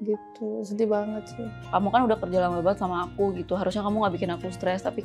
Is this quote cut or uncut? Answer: cut